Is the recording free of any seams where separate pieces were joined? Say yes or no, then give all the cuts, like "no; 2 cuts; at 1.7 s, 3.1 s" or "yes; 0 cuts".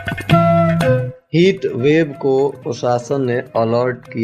no; 1 cut; at 1.2 s